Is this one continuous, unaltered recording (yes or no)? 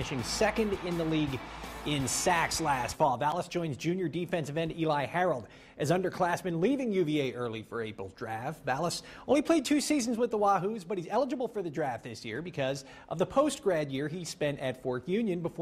yes